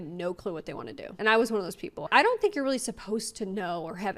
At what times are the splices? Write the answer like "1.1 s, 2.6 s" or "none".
1.1 s